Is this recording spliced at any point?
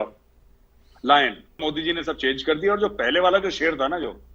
yes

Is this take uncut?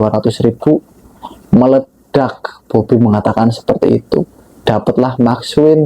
yes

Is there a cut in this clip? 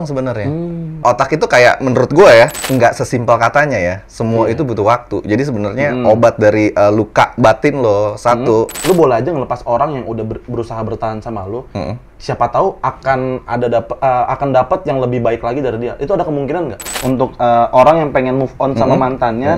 yes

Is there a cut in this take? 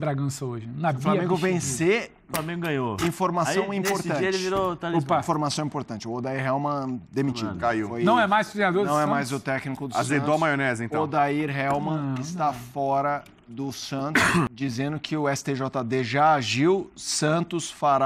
yes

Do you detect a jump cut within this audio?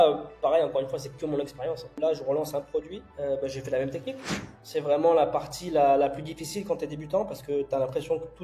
yes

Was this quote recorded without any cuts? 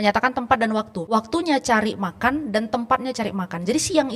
no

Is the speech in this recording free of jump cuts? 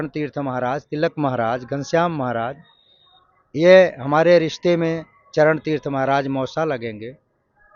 yes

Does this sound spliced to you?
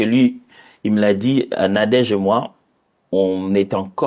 no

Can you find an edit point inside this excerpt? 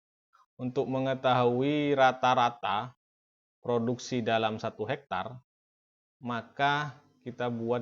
no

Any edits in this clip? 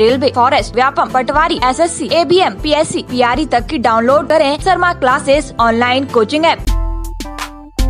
yes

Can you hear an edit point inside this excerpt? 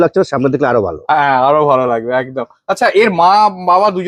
no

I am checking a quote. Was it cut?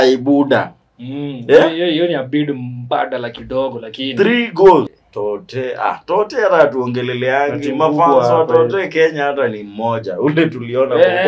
yes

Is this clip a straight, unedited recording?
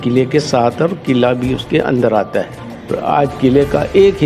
no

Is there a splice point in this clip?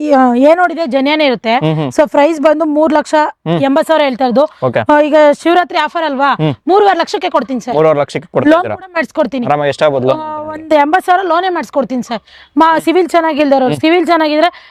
no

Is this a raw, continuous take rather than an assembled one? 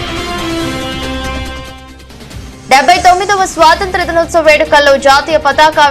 no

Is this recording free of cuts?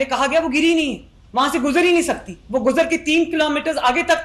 yes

